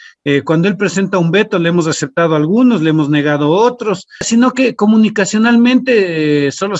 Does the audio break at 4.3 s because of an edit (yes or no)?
yes